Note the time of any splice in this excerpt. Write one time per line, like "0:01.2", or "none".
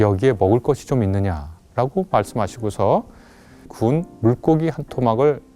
0:03.7